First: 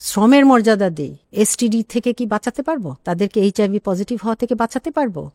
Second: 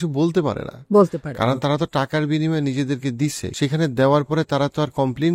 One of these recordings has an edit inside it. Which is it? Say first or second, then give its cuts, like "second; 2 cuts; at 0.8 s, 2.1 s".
second; 1 cut; at 3.4 s